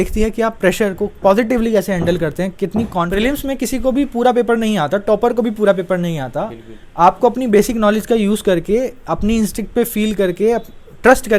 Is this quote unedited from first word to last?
no; 1 cut; at 3.1 s

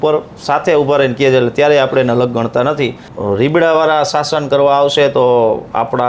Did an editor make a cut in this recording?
yes; 1 cut; at 3.1 s

